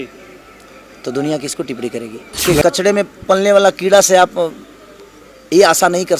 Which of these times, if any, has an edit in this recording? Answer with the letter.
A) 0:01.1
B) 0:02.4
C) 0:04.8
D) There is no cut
B